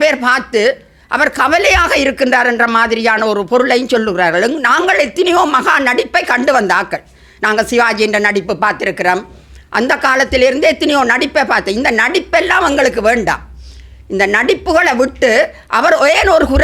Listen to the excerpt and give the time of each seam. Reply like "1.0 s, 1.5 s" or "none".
none